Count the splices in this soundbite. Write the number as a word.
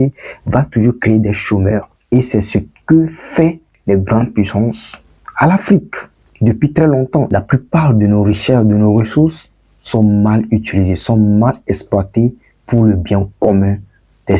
two